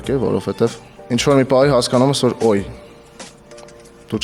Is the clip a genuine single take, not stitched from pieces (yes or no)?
yes